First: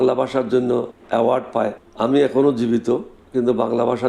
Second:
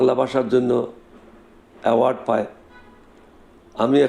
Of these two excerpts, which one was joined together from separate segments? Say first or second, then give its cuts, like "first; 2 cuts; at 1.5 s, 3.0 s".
first; 2 cuts; at 1.0 s, 1.8 s